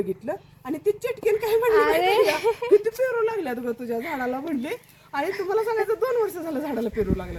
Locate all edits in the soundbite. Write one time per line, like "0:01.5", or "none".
none